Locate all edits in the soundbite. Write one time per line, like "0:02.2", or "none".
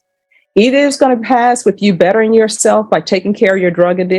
0:02.0